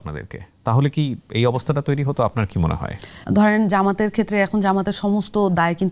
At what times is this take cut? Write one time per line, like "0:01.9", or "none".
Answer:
0:03.1

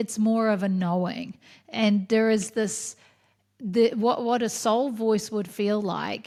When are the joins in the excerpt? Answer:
none

